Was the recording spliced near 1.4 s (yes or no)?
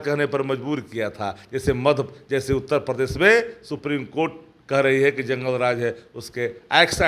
no